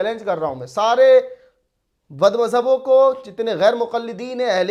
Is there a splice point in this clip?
no; 0 cuts

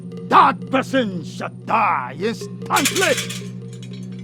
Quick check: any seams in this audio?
no; 0 cuts

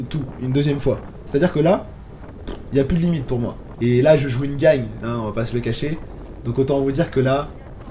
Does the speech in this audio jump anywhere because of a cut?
yes; 1 cut; at 3.6 s

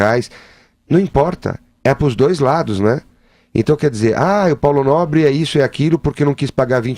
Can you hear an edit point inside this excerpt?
yes; 1 cut; at 5.2 s

